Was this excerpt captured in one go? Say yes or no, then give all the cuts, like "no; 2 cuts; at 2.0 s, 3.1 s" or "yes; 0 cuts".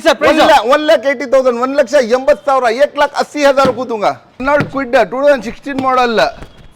yes; 0 cuts